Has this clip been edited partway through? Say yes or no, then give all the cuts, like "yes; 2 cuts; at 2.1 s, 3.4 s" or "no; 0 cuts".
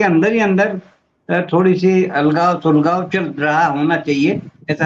no; 0 cuts